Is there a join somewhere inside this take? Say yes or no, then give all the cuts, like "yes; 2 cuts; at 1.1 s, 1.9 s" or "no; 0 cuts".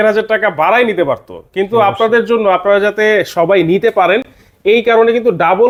no; 0 cuts